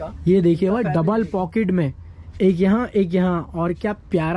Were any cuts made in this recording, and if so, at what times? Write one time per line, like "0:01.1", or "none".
none